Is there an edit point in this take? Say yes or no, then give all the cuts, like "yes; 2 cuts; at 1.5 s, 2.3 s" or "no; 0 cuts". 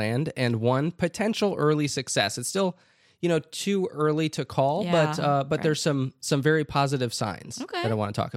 no; 0 cuts